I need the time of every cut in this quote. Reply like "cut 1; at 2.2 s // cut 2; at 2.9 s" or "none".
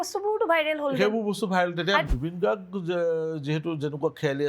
cut 1; at 2.0 s